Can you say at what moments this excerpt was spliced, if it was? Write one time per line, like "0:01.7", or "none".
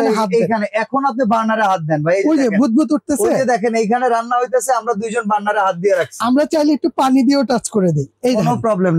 none